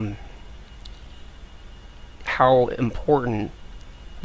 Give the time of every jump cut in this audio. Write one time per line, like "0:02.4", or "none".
0:01.8

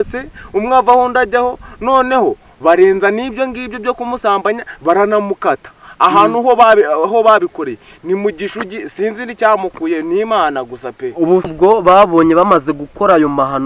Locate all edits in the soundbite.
0:11.5

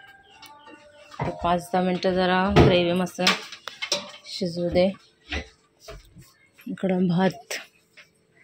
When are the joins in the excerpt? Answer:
none

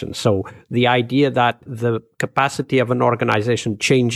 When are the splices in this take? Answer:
0:01.7

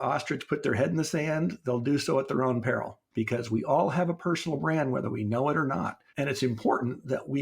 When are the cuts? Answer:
0:03.0
0:06.0

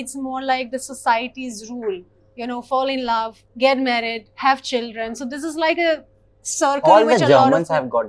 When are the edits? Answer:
none

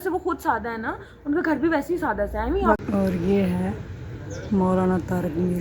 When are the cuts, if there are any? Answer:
0:02.8

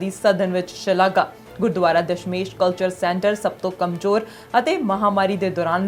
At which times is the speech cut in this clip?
none

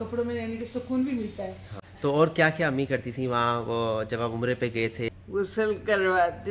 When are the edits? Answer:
0:01.9
0:05.2

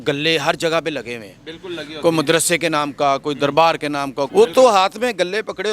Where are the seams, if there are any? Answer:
0:04.3

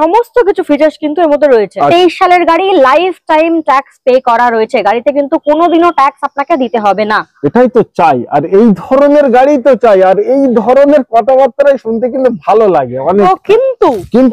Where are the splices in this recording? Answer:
0:01.9
0:13.2

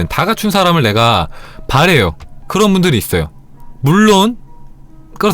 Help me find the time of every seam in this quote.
0:02.3

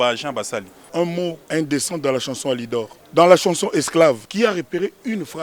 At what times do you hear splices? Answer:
0:01.1
0:03.0
0:04.3

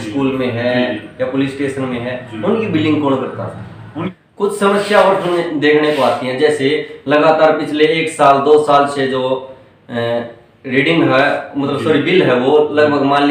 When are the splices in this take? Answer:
0:04.1

